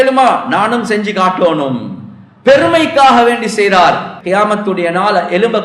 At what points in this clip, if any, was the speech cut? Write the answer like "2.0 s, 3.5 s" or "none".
4.1 s